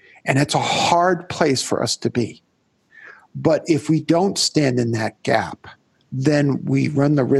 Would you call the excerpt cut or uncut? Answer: uncut